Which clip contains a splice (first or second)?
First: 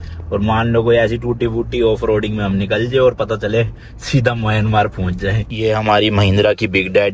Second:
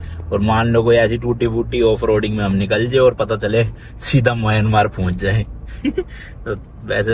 first